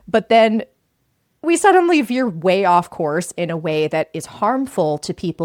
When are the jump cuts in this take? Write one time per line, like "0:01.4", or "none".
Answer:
none